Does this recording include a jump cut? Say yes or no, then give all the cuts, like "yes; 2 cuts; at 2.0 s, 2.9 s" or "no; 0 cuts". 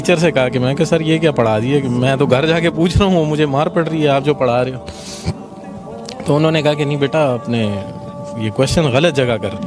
no; 0 cuts